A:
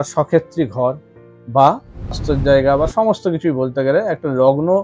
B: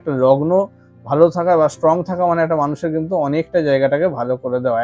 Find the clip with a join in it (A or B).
A